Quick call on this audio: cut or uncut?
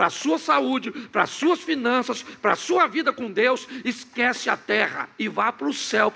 uncut